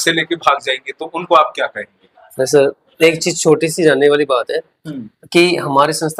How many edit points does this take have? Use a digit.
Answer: 0